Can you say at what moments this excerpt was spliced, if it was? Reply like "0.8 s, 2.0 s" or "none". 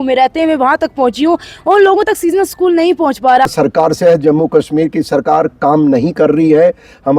3.5 s